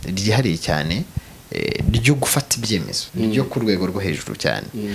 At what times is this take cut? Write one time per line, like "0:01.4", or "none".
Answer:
0:03.0